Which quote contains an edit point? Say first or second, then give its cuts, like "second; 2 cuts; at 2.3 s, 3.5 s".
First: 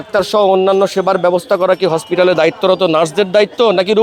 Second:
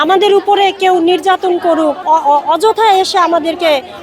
second; 1 cut; at 2.0 s